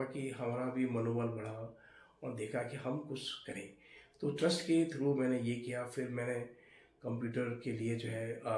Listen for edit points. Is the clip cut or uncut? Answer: uncut